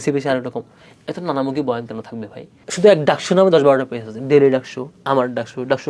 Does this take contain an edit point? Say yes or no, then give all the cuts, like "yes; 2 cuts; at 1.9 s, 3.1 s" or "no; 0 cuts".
yes; 1 cut; at 2.6 s